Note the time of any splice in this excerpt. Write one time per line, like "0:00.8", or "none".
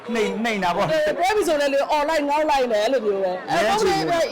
0:03.4